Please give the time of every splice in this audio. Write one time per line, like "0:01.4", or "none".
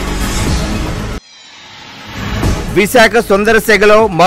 0:00.8
0:02.4